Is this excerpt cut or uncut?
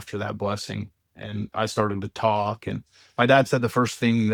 uncut